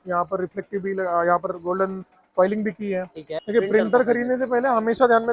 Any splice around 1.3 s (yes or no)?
no